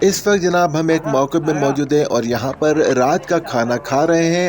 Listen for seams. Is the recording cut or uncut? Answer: uncut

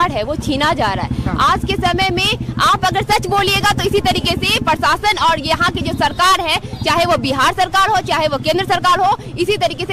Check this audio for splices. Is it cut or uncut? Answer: uncut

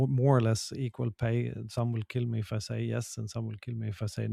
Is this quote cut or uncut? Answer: uncut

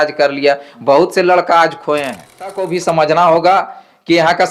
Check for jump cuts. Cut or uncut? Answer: cut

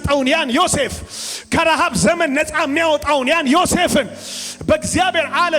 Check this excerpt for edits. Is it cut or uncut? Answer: uncut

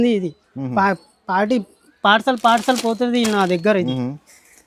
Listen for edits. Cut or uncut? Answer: uncut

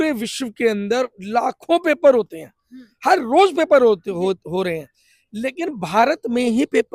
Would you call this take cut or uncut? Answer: uncut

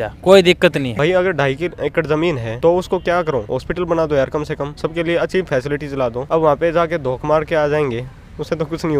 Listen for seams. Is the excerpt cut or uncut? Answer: cut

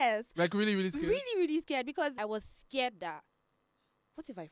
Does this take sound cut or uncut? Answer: cut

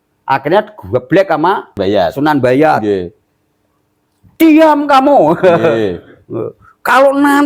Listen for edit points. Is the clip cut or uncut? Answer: cut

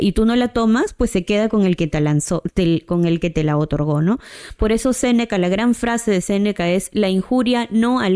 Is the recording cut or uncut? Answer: uncut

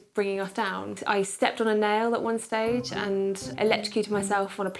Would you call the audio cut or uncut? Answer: cut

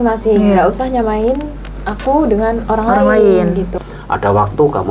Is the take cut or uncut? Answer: cut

